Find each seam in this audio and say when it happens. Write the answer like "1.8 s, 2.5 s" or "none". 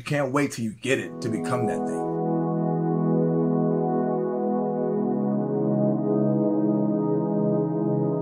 none

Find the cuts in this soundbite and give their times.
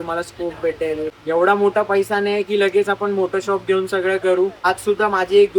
1.1 s, 4.6 s

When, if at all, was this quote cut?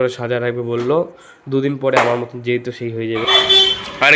3.2 s

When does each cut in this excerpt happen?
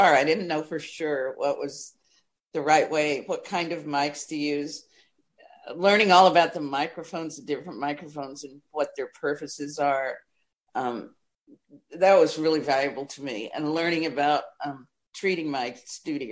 none

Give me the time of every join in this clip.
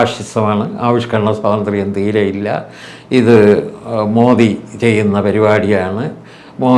none

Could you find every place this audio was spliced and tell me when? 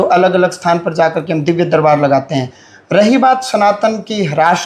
none

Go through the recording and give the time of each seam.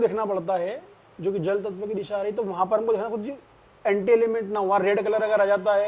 none

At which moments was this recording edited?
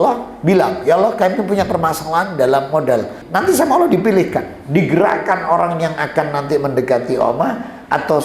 3.2 s

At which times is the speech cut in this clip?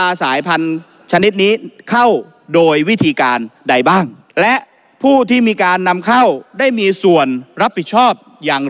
4.2 s

